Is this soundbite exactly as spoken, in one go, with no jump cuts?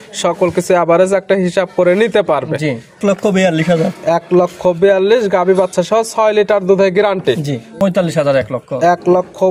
no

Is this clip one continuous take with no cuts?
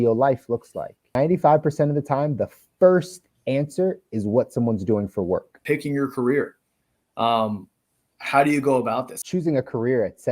no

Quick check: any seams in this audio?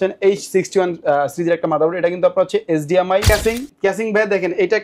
yes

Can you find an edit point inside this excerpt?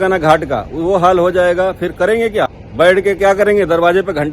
yes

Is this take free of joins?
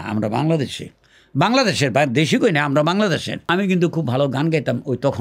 no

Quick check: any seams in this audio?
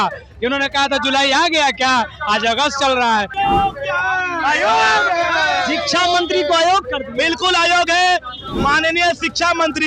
yes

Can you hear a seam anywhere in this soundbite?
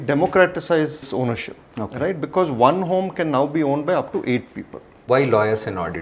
yes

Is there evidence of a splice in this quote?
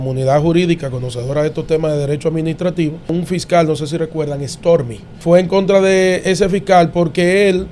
yes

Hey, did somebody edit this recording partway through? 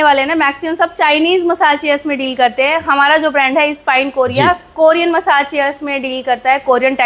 no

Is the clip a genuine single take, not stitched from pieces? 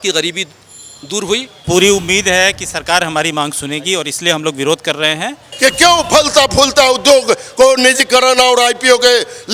no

